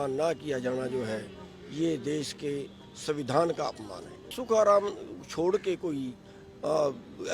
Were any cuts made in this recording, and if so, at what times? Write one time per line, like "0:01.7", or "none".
0:04.4